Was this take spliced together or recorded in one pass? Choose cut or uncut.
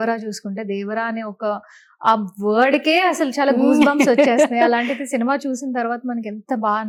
uncut